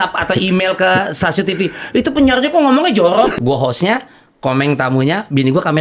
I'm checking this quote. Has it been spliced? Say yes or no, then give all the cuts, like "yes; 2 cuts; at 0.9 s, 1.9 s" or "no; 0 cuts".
yes; 1 cut; at 3.3 s